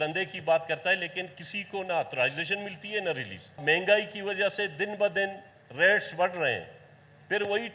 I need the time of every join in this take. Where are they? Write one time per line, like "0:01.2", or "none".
0:03.6